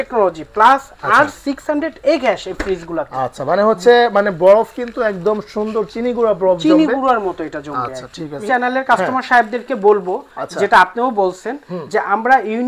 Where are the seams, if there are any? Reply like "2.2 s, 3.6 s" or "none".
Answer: 8.4 s

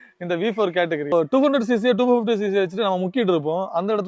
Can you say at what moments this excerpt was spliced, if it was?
1.1 s

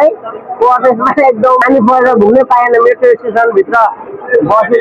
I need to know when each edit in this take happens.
1.6 s

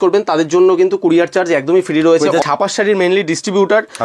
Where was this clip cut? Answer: 2.4 s

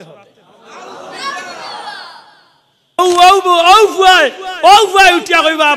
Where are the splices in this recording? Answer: 3.0 s

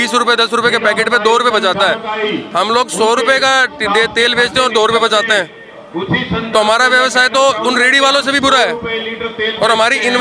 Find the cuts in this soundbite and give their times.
none

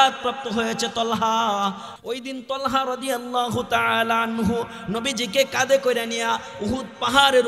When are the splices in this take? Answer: 1.9 s

